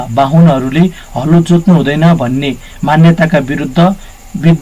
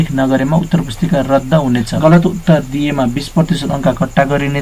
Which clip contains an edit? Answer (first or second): second